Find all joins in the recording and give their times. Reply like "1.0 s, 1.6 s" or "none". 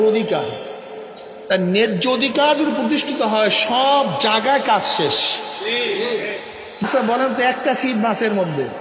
6.9 s